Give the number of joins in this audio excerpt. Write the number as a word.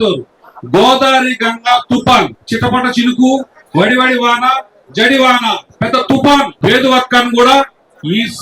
three